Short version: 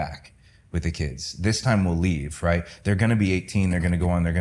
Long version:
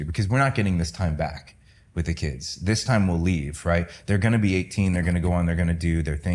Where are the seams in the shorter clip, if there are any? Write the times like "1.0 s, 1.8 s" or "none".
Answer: none